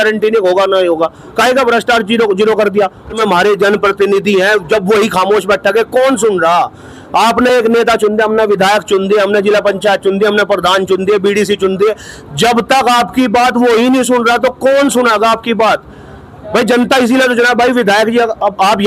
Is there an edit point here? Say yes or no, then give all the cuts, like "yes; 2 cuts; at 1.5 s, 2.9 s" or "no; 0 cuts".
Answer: yes; 1 cut; at 3.1 s